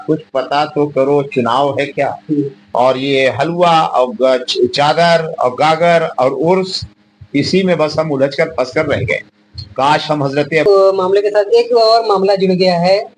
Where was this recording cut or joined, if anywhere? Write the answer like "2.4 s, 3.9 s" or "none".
2.6 s, 10.7 s